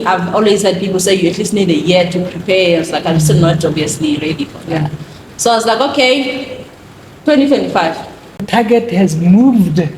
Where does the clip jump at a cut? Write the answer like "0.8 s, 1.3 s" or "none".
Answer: 8.5 s